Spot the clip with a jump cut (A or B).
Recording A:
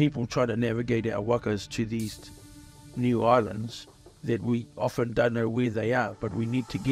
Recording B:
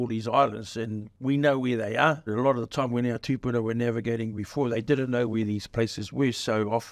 B